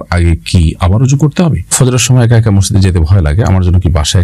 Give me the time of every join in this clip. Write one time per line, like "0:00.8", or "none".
0:01.7

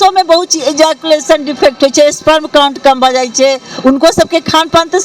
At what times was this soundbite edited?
none

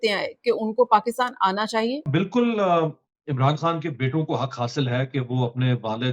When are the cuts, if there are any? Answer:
0:02.1

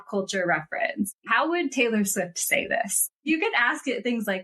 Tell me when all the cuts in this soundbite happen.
0:01.1
0:03.2

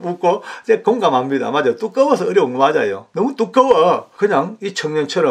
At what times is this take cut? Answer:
0:03.0
0:04.1

